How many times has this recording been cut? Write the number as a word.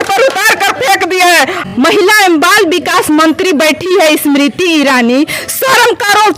one